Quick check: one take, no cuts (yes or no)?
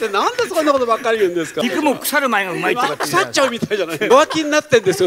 no